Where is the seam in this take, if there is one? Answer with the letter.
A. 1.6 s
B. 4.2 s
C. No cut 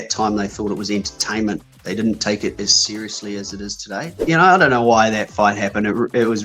B